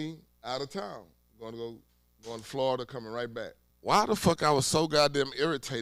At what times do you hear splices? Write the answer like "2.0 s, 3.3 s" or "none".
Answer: 3.6 s